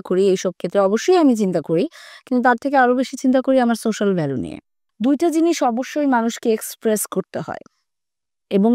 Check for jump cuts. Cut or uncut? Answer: cut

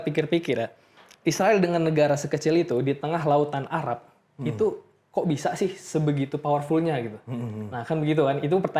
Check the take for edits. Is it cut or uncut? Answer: uncut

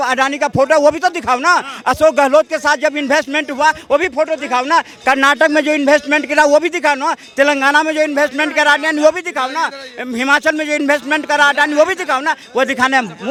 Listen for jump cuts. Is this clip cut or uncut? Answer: uncut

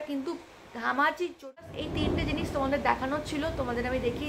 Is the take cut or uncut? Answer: cut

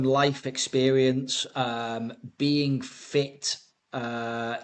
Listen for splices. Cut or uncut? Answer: uncut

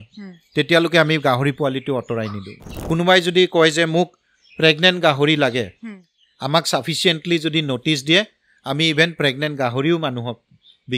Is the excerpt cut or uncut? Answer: cut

